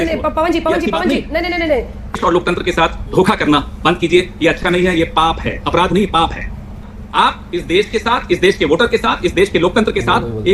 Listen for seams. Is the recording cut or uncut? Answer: cut